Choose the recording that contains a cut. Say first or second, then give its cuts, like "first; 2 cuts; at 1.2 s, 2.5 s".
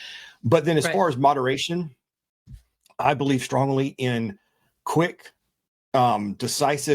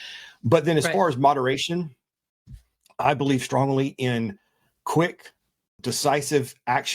second; 1 cut; at 5.8 s